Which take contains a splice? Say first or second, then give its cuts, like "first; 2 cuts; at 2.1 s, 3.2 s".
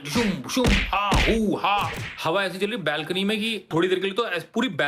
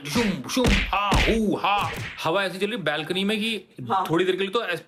first; 1 cut; at 3.7 s